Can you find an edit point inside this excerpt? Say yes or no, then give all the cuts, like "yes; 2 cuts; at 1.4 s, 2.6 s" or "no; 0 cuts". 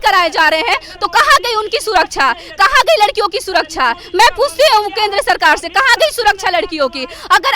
no; 0 cuts